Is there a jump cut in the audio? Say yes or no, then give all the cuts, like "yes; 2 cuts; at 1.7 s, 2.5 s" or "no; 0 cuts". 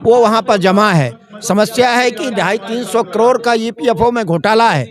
no; 0 cuts